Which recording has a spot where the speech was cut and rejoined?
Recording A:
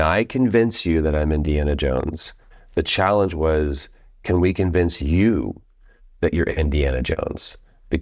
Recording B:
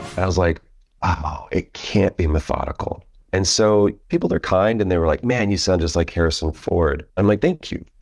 B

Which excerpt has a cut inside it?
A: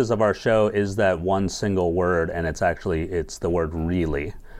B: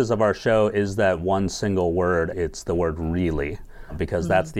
B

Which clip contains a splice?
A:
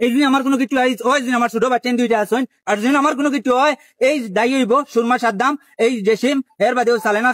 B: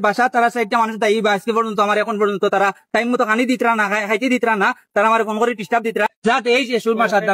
B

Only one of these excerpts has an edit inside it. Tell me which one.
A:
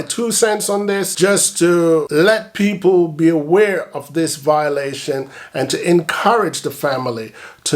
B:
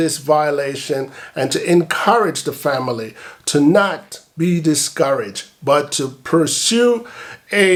A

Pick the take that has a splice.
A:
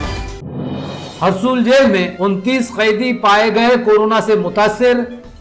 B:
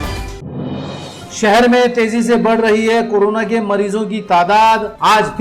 A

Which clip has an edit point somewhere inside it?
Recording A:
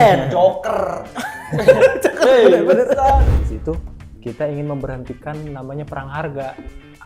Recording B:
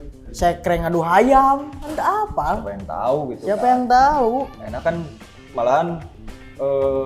A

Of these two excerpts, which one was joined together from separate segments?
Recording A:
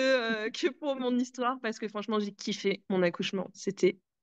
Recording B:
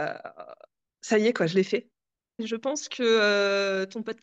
B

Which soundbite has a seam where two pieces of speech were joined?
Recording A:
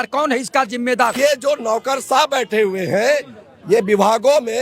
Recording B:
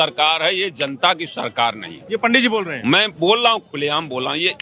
A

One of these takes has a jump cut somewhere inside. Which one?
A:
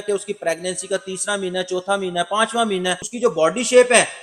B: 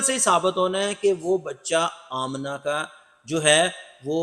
A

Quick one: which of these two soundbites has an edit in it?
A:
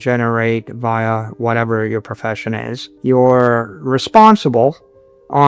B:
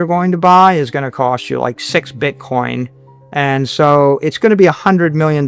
A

